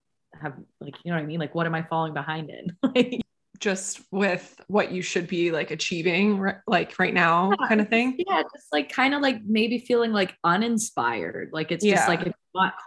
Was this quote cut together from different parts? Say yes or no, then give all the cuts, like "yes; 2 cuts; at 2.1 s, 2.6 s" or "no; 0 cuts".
yes; 1 cut; at 3.1 s